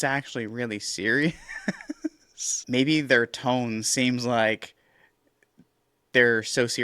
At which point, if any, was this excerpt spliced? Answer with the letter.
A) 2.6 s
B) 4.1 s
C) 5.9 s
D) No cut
A